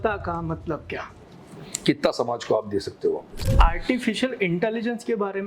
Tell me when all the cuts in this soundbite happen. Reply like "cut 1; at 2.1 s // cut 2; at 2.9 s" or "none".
cut 1; at 3.4 s